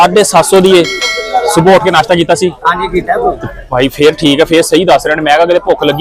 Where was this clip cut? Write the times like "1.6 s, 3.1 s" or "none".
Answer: none